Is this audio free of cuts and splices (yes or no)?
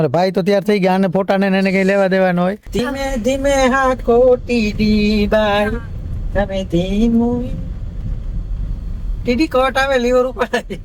no